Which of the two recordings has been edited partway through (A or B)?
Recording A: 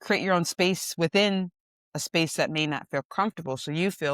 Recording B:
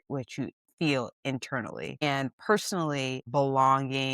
B